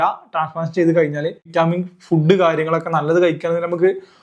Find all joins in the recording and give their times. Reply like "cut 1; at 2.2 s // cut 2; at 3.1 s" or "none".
cut 1; at 1.4 s